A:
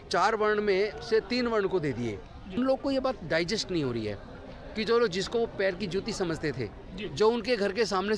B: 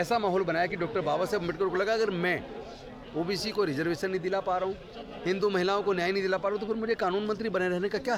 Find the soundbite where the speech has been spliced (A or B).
A